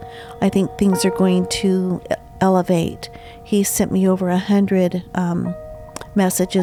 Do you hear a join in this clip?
no; 0 cuts

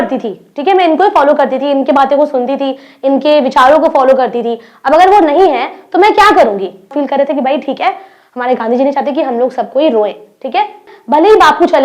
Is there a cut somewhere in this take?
yes; 2 cuts; at 6.9 s, 10.9 s

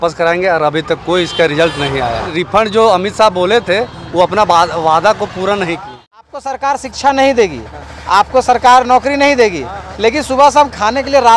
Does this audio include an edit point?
yes; 2 cuts; at 2.2 s, 6.2 s

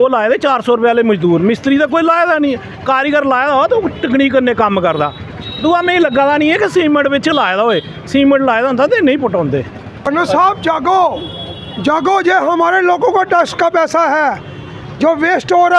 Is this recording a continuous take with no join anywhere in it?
no; 1 cut; at 10.1 s

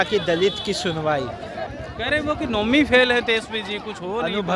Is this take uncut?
no; 1 cut; at 1.7 s

